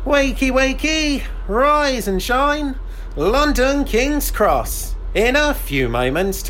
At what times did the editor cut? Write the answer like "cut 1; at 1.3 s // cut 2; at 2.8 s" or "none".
none